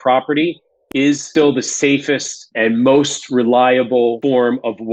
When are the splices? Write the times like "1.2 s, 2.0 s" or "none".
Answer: 1.0 s, 2.4 s, 4.2 s